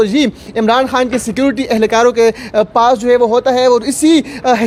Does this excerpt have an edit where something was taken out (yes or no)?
no